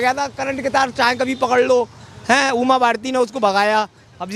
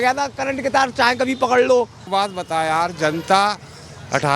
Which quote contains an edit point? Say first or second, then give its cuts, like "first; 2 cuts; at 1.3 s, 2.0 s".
second; 1 cut; at 2.0 s